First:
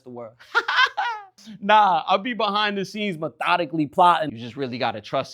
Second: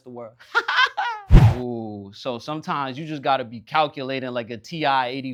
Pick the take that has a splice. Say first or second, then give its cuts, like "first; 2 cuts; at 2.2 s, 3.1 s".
first; 2 cuts; at 1.2 s, 4.3 s